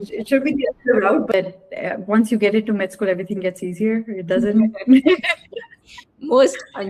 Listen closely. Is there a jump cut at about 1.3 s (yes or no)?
yes